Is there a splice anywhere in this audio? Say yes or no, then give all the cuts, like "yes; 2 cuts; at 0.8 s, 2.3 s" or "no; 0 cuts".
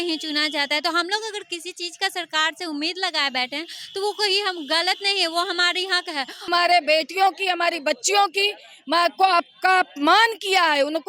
yes; 1 cut; at 6.5 s